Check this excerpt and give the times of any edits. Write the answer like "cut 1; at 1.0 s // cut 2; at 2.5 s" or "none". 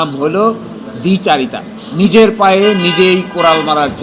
cut 1; at 1.8 s